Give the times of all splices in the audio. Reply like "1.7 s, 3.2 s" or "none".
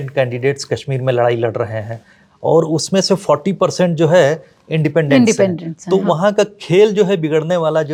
none